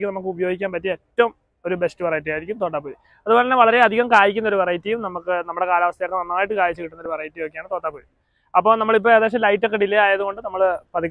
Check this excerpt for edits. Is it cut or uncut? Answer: uncut